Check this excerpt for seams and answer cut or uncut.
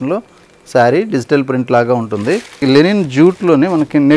cut